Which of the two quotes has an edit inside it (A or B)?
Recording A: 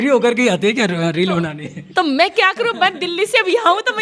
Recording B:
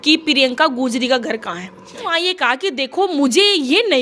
B